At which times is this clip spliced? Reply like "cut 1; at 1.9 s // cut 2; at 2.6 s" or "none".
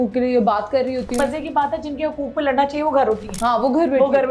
cut 1; at 1.2 s // cut 2; at 3.3 s